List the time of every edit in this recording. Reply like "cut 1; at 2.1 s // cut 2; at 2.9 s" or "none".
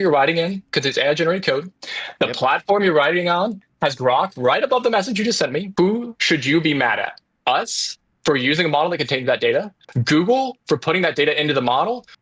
cut 1; at 5.7 s // cut 2; at 7.3 s